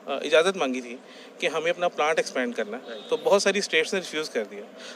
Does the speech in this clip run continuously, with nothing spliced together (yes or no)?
yes